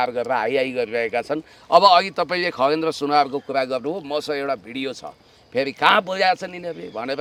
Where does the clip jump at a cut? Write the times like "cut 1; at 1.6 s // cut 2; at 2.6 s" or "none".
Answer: none